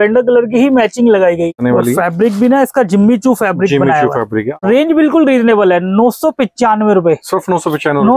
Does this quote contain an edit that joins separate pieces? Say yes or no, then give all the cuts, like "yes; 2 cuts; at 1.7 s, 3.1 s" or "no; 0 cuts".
yes; 2 cuts; at 1.5 s, 4.6 s